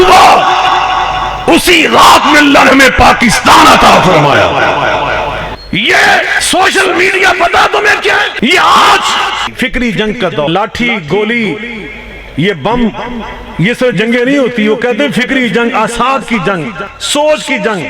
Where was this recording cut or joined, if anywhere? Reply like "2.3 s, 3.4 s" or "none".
5.5 s, 6.4 s, 8.3 s, 9.5 s, 10.5 s